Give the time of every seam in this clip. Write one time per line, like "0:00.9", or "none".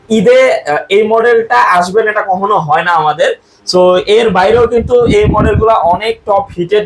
none

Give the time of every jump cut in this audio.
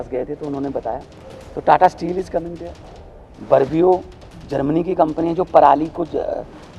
none

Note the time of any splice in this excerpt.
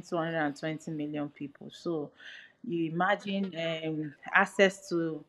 none

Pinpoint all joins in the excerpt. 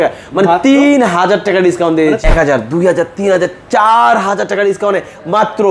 0:02.2

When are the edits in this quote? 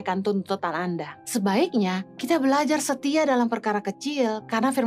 0:01.1
0:02.1

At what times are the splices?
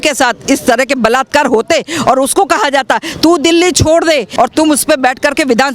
0:04.3

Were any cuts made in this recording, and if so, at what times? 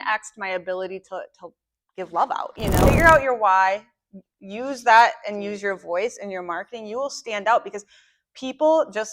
0:02.8

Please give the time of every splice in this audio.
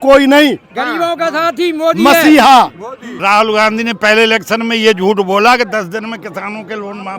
0:03.2

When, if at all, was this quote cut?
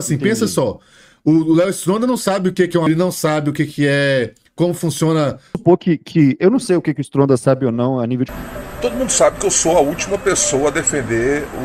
0:02.9
0:05.6
0:08.3

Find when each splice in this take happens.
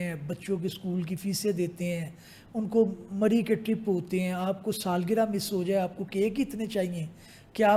none

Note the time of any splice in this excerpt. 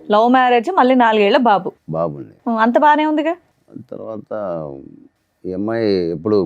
none

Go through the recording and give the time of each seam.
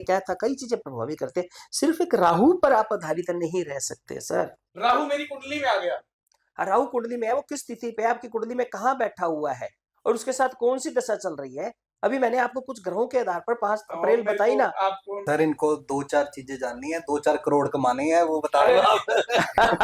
0:04.6
0:15.1

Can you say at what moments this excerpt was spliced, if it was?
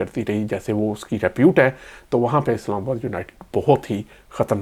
none

